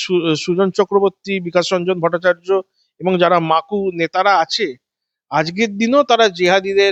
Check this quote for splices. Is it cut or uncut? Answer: uncut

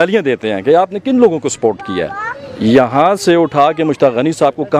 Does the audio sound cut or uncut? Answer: uncut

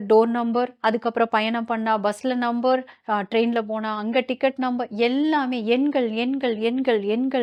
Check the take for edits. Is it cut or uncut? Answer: uncut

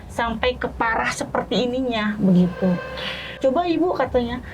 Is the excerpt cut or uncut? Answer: cut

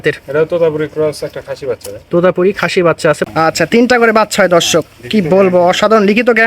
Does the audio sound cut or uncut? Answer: cut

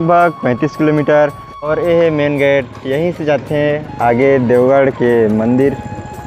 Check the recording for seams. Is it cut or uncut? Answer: cut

